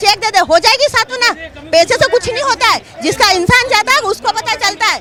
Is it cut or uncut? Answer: uncut